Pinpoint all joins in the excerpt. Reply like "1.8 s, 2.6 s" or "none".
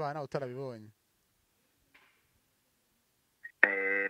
none